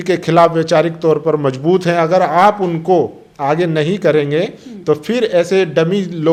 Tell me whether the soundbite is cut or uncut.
uncut